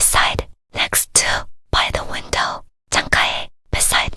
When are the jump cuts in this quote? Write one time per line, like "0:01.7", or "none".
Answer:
0:01.2